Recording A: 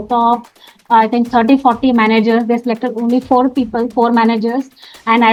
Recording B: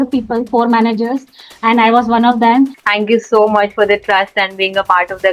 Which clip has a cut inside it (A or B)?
B